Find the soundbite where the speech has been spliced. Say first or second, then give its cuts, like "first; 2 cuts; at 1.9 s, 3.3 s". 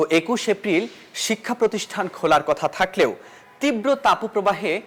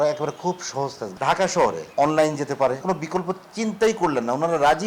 second; 3 cuts; at 1.0 s, 1.8 s, 2.8 s